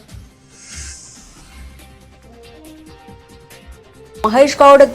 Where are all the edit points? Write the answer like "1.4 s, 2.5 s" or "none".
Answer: 3.7 s